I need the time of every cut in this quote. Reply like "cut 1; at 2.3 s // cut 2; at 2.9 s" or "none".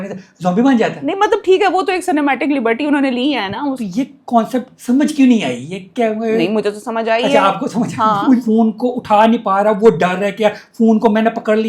cut 1; at 3.8 s // cut 2; at 4.7 s // cut 3; at 8.4 s